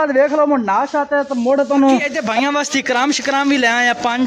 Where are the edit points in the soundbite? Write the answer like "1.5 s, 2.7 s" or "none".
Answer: 2.2 s